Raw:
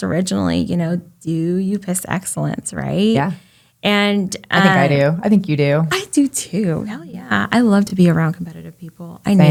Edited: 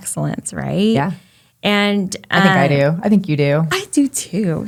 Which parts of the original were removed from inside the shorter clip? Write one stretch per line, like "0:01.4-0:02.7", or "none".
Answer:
none

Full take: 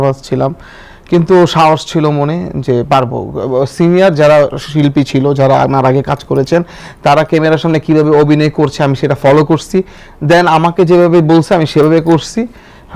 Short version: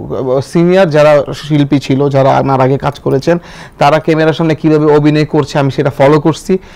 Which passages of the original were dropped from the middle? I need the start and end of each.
none

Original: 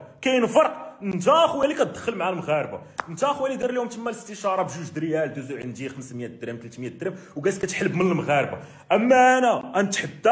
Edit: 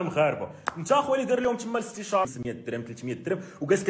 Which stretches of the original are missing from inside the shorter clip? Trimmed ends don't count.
0:04.6-0:06.0

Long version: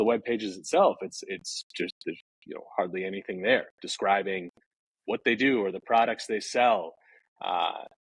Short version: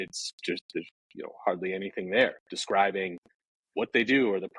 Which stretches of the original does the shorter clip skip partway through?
none

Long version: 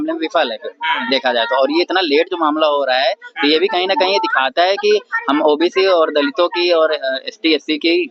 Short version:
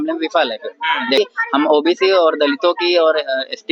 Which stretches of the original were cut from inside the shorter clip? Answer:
0:01.2-0:04.9

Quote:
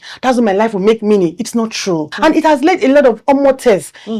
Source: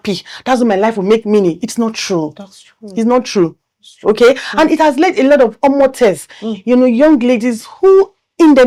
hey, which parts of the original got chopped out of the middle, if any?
0:02.3-0:04.5

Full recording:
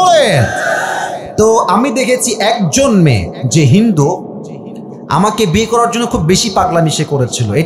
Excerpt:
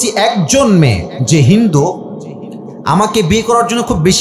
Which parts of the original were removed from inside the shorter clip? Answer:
none

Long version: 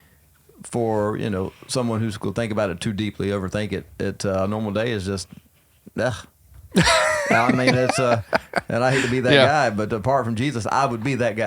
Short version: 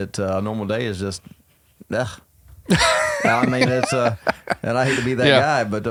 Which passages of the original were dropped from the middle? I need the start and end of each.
none

